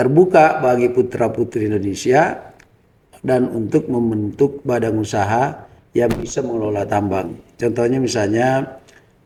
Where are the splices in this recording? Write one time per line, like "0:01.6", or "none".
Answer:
none